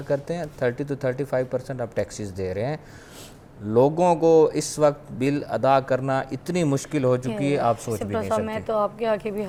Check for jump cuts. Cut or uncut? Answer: uncut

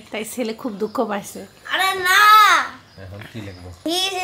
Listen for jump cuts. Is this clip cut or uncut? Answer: uncut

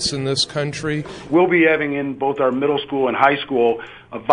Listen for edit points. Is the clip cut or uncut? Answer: cut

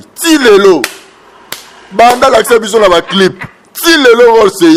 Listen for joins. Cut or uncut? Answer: uncut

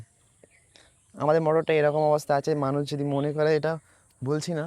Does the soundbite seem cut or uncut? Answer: uncut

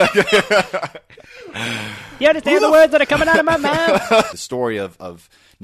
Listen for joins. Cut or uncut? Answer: cut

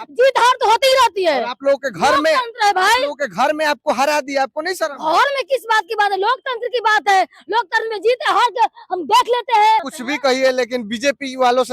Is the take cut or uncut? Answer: cut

